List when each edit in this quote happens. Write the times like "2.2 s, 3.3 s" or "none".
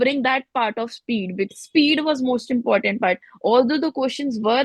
1.5 s